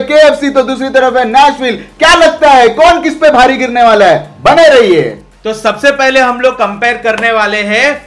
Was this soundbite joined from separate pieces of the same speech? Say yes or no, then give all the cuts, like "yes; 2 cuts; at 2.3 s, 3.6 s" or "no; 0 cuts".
no; 0 cuts